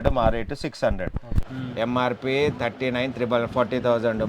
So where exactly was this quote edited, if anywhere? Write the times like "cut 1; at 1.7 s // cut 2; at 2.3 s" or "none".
cut 1; at 1.3 s